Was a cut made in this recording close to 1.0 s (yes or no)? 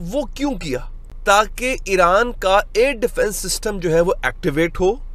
yes